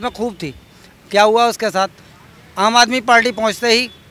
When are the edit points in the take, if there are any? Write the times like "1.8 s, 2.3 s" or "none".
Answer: none